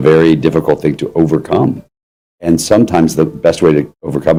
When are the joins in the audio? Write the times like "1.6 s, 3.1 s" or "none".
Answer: none